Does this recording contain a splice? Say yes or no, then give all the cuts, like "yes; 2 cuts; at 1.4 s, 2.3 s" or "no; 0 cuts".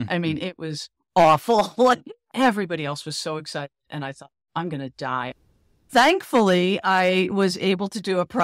yes; 2 cuts; at 2.2 s, 5.4 s